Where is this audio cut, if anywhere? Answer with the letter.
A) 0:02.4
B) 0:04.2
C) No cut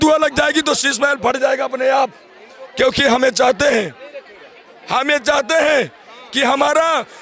C